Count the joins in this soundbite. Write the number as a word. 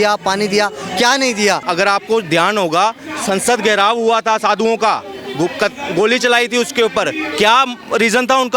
one